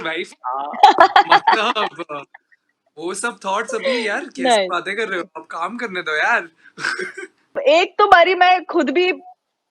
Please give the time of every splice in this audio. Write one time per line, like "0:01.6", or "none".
0:07.5